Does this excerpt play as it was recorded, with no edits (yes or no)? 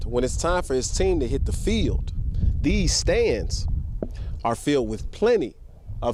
yes